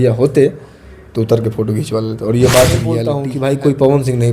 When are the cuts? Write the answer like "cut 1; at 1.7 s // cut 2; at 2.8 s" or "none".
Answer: cut 1; at 3.2 s